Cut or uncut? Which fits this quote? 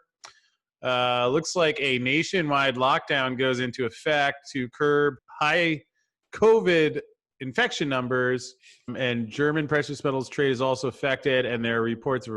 cut